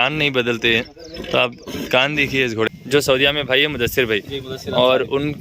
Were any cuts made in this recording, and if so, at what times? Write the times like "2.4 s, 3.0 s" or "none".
2.7 s